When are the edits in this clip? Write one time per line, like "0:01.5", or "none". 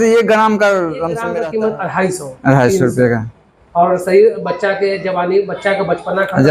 0:01.3